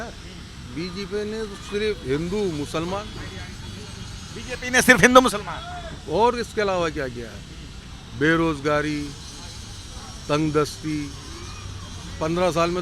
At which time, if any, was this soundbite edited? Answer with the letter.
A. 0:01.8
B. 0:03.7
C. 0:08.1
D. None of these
D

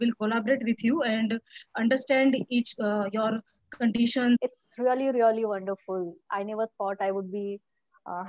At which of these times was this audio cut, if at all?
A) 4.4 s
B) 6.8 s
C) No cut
A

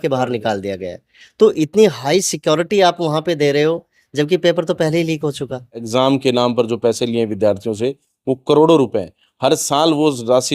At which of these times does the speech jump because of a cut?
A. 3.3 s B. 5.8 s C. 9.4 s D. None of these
B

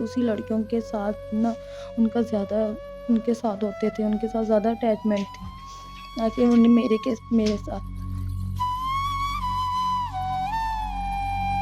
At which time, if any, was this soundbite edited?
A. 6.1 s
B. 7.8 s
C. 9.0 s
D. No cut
B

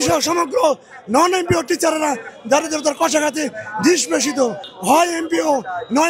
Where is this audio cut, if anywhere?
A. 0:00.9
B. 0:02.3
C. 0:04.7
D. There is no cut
C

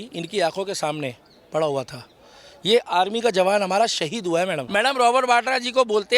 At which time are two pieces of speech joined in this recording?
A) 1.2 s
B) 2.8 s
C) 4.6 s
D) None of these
C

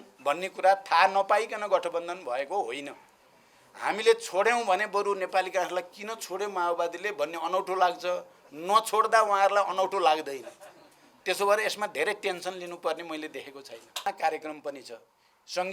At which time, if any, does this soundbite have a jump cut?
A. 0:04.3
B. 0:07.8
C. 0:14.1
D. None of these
C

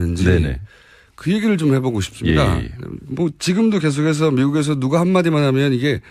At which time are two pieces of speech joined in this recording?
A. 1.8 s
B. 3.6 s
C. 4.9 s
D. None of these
B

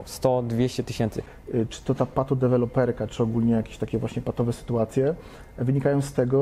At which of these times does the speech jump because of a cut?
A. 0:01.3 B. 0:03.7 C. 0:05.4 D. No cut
A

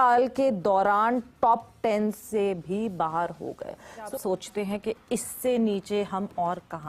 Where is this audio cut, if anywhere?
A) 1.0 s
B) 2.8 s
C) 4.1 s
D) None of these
C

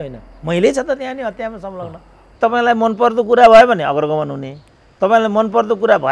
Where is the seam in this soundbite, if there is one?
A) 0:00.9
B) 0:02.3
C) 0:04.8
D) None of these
B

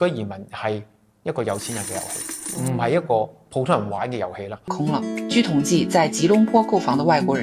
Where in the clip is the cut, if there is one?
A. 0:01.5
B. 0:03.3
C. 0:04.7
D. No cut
C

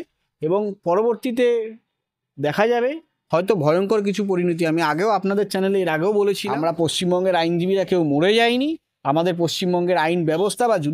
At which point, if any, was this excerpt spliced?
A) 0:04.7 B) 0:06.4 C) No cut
B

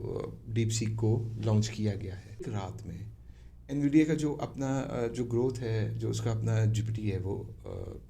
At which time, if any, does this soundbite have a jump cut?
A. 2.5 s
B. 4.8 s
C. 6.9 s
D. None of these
A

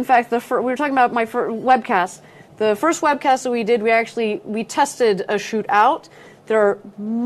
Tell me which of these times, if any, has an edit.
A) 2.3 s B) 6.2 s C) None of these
C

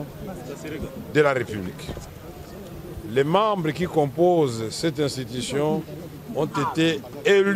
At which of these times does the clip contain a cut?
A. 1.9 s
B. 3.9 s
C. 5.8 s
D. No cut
D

